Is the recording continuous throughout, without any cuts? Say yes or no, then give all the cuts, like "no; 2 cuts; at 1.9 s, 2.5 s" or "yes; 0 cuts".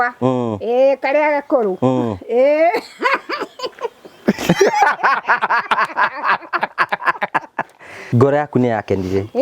no; 1 cut; at 8.0 s